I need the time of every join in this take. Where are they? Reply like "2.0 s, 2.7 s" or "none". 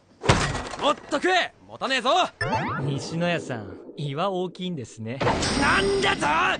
none